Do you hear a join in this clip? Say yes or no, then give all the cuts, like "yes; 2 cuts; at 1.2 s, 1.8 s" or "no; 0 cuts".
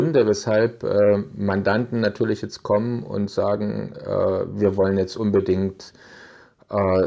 no; 0 cuts